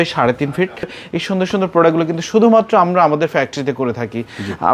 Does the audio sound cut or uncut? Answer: cut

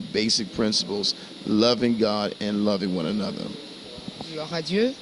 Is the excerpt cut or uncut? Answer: uncut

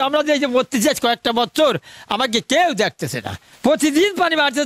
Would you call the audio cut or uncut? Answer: cut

